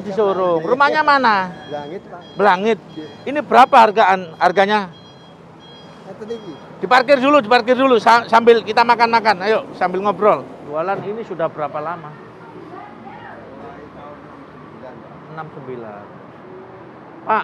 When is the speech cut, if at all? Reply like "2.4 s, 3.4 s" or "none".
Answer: 10.6 s